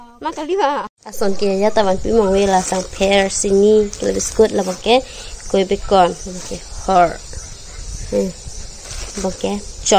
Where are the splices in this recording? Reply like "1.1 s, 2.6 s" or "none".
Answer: 1.0 s